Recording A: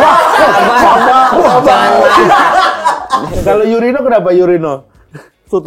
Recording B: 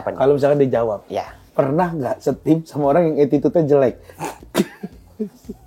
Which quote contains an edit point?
A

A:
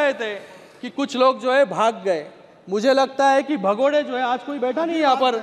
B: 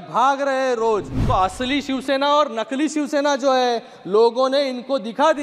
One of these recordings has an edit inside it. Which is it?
B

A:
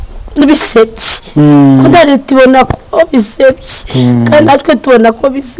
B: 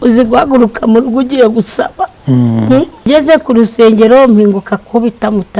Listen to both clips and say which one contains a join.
B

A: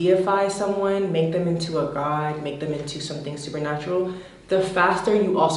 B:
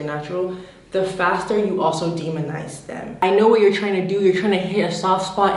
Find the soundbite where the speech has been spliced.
B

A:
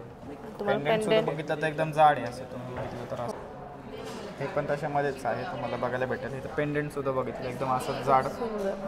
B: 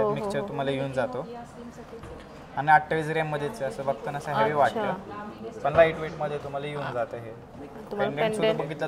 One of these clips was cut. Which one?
A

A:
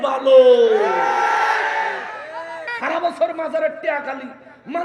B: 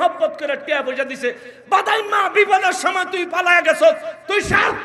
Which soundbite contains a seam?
A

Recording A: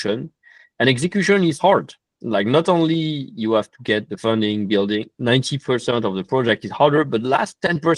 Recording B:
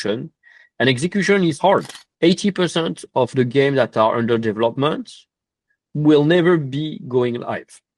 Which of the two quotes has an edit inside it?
B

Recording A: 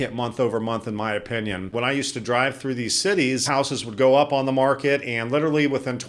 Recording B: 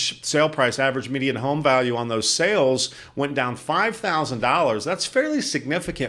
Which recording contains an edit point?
A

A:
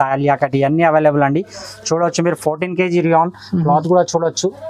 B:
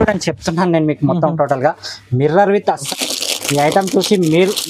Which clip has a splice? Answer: B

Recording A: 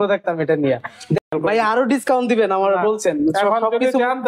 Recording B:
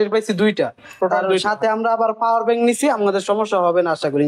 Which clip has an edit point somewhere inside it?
A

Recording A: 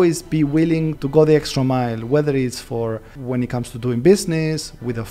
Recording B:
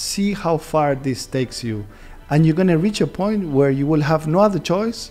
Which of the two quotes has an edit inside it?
A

